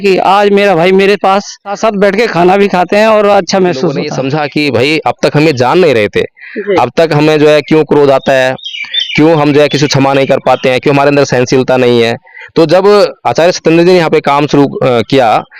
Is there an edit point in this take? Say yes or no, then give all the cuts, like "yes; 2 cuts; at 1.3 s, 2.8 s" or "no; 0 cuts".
yes; 2 cuts; at 1.7 s, 4.1 s